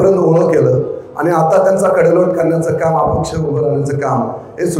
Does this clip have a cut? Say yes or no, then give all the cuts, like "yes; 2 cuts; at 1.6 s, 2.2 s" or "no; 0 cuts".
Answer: no; 0 cuts